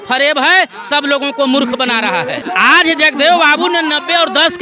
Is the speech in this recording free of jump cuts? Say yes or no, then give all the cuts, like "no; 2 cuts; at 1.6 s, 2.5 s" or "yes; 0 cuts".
no; 1 cut; at 2.4 s